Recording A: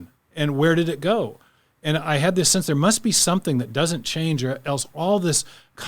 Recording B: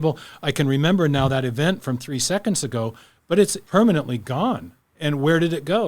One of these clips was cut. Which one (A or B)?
B